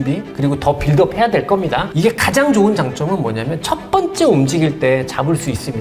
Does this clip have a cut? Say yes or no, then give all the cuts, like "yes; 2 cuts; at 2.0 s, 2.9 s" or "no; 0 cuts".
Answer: yes; 1 cut; at 1.9 s